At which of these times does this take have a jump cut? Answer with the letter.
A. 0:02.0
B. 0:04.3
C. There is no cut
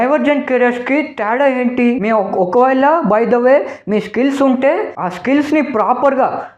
A